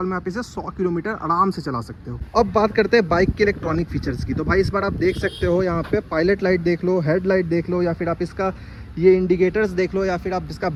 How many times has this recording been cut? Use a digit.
0